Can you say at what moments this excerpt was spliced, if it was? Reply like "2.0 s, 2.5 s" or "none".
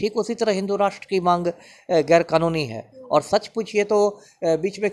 none